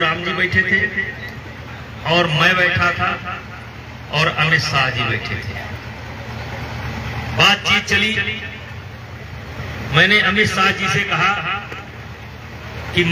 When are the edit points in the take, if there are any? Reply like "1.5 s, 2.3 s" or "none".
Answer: none